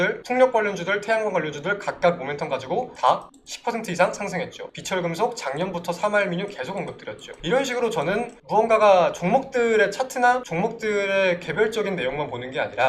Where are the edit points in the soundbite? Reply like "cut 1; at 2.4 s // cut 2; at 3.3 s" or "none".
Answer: none